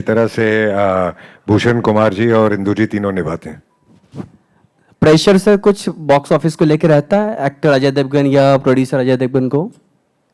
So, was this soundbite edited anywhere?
no; 0 cuts

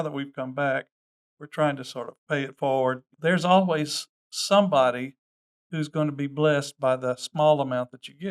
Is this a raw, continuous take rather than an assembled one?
no; 1 cut; at 3.1 s

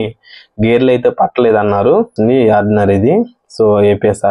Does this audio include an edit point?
yes; 1 cut; at 2.1 s

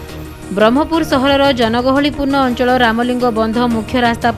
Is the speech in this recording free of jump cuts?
yes; 0 cuts

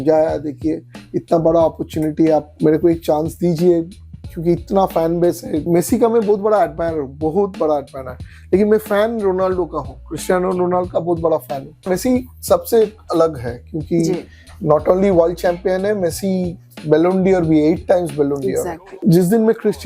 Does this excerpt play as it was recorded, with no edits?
no; 4 cuts; at 2.5 s, 5.6 s, 11.8 s, 18.8 s

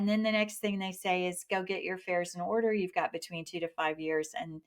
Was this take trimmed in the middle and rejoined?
no; 0 cuts

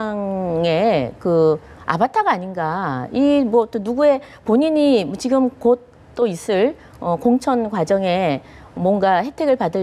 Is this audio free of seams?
yes; 0 cuts

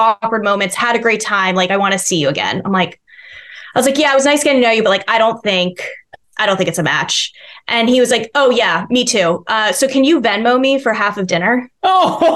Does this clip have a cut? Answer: no; 0 cuts

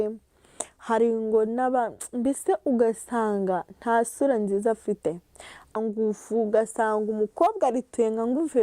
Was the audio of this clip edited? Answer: yes; 1 cut; at 5.7 s

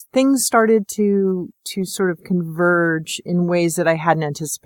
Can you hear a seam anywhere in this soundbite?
no; 0 cuts

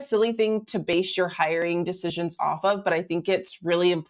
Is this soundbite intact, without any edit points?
yes; 0 cuts

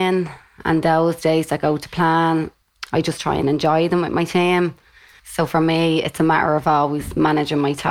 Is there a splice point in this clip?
yes; 2 cuts; at 2.6 s, 5.2 s

